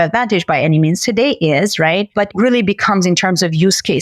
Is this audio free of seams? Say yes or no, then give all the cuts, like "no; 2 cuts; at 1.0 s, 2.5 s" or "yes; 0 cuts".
no; 1 cut; at 2.3 s